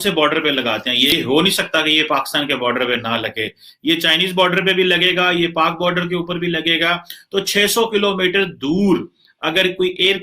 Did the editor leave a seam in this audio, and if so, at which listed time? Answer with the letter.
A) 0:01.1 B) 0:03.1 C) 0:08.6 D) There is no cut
A